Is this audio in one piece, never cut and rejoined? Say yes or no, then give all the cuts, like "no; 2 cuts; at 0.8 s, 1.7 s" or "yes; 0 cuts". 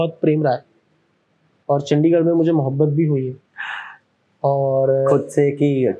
yes; 0 cuts